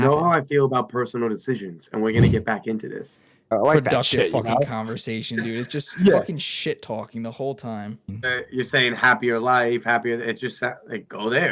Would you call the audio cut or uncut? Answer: cut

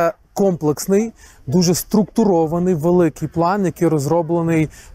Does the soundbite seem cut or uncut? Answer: uncut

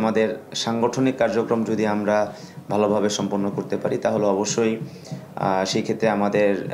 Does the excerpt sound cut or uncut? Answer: uncut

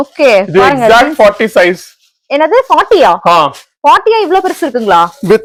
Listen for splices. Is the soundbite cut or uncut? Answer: uncut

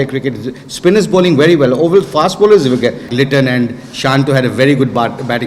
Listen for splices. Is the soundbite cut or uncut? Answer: cut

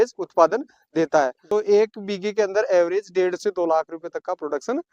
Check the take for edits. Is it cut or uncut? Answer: cut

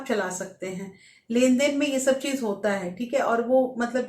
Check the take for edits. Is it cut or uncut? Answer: uncut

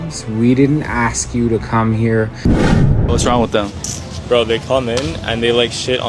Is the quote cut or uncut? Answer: cut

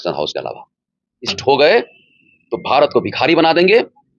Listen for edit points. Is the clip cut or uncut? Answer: cut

